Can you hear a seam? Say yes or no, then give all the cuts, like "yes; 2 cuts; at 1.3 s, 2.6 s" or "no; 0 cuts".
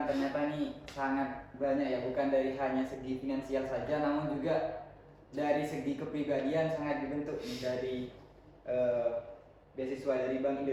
no; 0 cuts